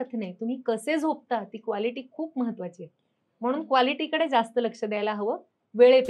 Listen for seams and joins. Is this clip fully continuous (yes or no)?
yes